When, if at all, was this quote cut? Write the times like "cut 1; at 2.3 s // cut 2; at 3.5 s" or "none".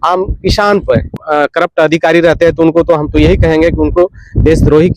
cut 1; at 1.1 s